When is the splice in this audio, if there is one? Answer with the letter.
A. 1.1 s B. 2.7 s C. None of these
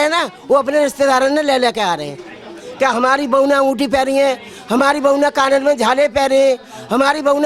C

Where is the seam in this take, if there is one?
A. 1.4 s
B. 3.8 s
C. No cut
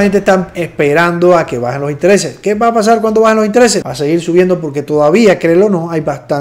B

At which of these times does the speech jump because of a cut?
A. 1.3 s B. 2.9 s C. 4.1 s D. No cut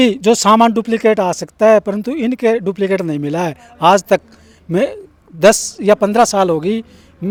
D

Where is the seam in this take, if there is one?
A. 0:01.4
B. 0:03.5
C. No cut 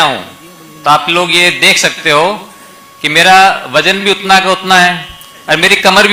C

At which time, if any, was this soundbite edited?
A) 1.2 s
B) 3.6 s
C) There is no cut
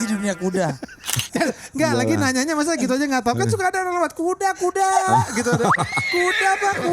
A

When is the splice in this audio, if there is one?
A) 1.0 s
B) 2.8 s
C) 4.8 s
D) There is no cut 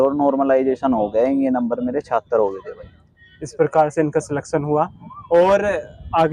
D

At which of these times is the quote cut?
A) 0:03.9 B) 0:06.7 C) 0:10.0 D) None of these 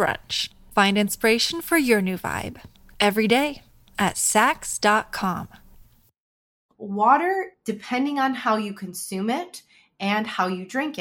B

